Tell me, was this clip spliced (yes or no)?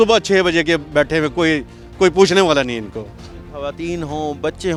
no